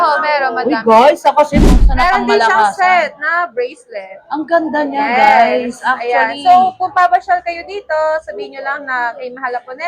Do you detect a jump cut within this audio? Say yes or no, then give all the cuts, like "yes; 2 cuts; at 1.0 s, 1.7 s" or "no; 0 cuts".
yes; 1 cut; at 1.8 s